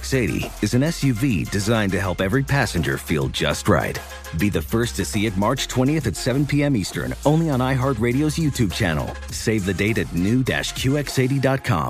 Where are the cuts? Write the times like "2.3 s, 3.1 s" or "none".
none